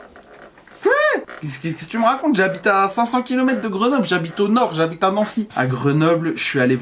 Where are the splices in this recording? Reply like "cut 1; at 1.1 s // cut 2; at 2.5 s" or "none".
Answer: cut 1; at 5.5 s